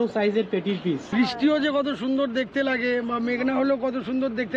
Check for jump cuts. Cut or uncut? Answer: cut